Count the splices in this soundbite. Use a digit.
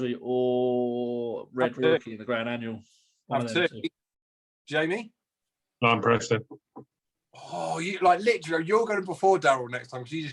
0